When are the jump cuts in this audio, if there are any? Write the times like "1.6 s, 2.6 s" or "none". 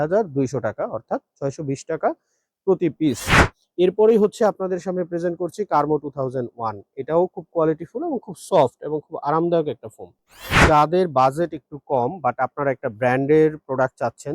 10.6 s